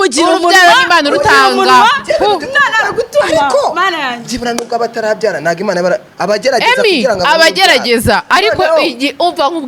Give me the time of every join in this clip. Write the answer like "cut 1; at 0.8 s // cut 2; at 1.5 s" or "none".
none